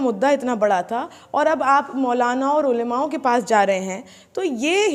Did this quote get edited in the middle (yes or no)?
no